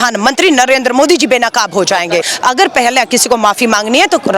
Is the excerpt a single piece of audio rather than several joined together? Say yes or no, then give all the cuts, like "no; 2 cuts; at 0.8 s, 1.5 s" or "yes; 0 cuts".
no; 1 cut; at 2.3 s